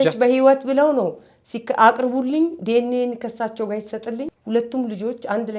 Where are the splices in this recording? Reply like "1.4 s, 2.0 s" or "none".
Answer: 4.3 s